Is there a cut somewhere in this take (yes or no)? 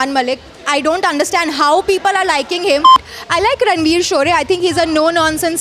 yes